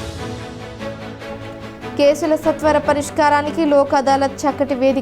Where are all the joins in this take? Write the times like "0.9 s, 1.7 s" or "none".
1.9 s